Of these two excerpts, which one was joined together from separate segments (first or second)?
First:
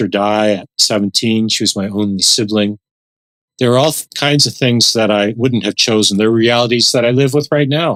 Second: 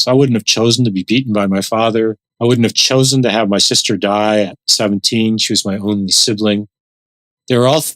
second